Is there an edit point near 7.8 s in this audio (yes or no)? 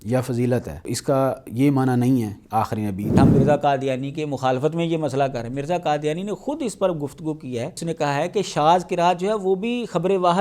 yes